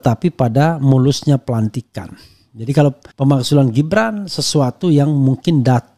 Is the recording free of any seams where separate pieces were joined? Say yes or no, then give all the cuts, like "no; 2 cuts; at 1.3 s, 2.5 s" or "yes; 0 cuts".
no; 1 cut; at 3.1 s